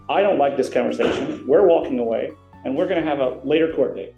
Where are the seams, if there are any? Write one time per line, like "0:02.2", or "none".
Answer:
none